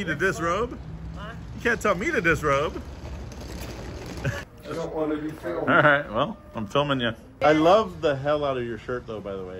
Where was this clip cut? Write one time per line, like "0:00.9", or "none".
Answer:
0:04.3
0:07.2